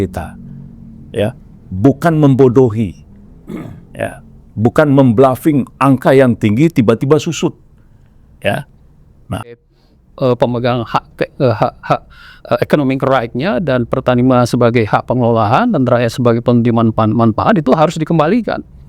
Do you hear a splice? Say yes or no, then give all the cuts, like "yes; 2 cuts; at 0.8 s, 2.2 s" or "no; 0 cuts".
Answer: yes; 1 cut; at 9.7 s